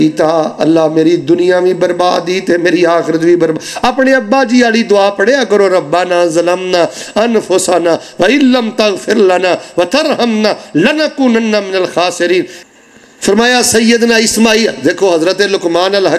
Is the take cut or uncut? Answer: cut